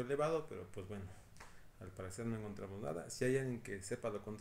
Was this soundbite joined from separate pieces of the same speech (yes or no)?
no